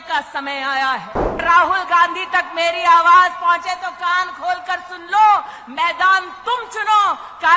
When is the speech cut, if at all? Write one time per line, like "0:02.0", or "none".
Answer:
0:01.4